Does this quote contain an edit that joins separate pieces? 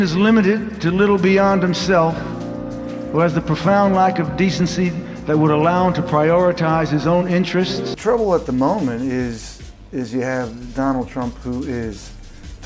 no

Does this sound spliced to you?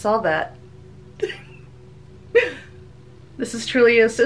no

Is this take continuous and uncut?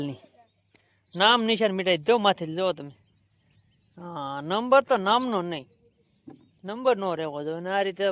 yes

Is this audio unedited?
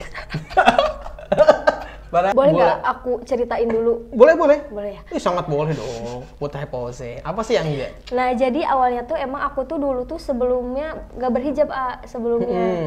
no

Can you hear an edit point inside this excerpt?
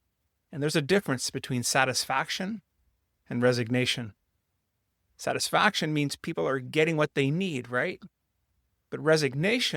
no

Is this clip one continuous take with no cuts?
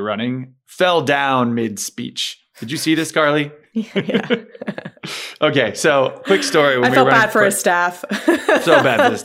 yes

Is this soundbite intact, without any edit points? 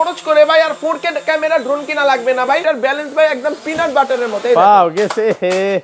no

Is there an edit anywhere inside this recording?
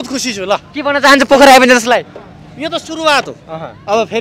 no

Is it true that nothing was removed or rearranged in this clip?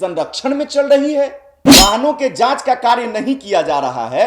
no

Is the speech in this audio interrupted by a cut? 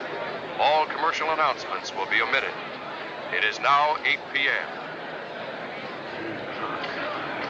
no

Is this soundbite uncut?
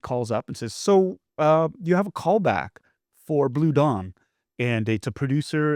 yes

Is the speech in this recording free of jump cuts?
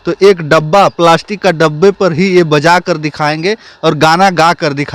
yes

